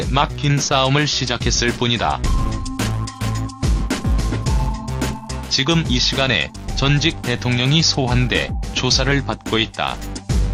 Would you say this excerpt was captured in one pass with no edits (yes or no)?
yes